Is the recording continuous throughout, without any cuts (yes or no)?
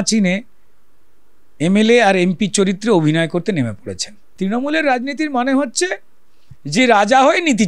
no